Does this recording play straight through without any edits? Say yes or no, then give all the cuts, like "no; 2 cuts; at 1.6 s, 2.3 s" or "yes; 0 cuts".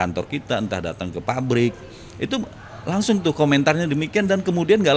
yes; 0 cuts